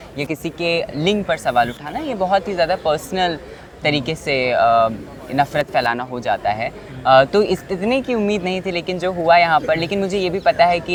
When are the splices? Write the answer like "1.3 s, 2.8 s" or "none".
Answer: none